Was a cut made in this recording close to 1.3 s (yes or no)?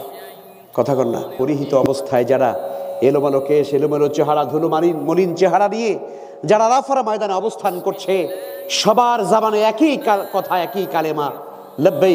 yes